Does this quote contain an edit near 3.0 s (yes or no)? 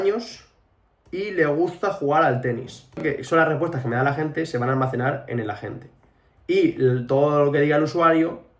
yes